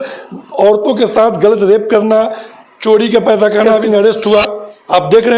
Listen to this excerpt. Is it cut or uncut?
cut